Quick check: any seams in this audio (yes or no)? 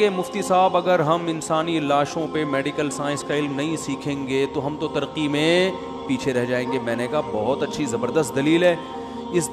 no